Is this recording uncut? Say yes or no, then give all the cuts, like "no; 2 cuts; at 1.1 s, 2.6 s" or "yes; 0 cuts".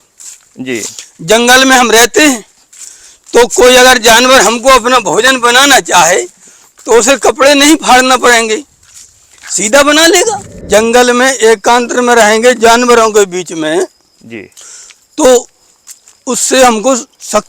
no; 1 cut; at 10.7 s